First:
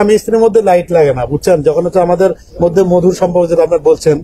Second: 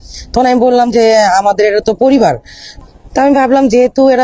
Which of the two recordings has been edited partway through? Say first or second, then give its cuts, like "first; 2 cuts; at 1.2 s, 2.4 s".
second; 1 cut; at 2.8 s